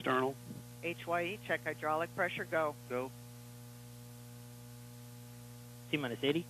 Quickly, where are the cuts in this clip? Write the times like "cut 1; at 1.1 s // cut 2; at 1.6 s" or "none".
cut 1; at 4.3 s

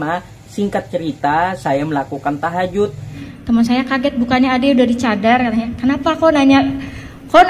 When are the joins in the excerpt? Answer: cut 1; at 3.1 s

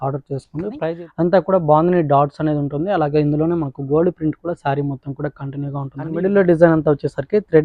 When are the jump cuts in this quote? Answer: cut 1; at 0.8 s // cut 2; at 6.2 s

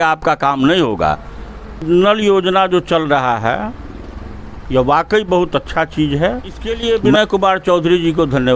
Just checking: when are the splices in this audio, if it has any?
cut 1; at 1.8 s // cut 2; at 6.7 s

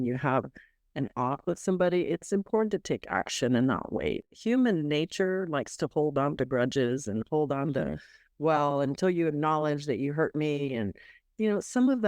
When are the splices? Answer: cut 1; at 4.3 s

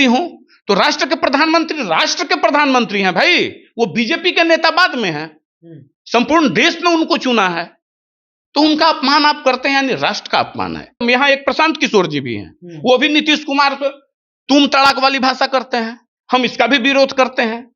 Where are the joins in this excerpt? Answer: cut 1; at 11.0 s

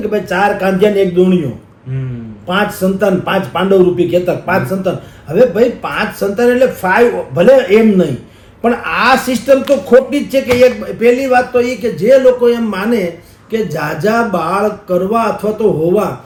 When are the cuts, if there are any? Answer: none

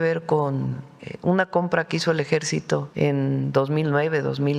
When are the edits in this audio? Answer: cut 1; at 2.9 s

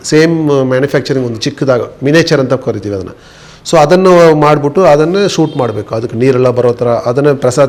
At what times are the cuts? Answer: none

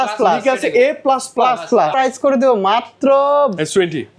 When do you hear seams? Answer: cut 1; at 1.9 s

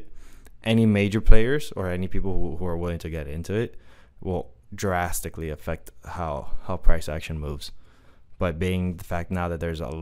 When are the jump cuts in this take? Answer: none

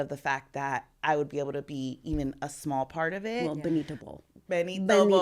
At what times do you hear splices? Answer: cut 1; at 3.4 s

